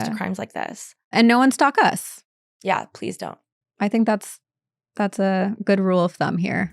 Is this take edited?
yes; 1 cut; at 1.0 s

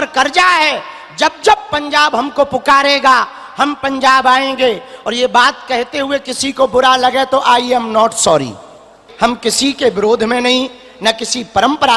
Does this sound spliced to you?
yes; 1 cut; at 9.0 s

